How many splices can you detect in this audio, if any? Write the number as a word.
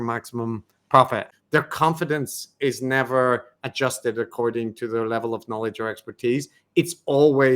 one